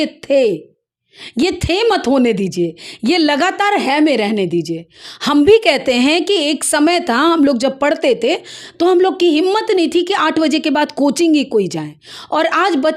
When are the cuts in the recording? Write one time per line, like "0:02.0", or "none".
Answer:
none